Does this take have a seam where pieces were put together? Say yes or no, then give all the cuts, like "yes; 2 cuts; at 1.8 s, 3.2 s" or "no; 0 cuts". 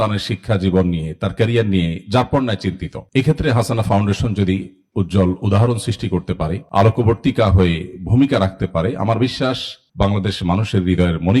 no; 0 cuts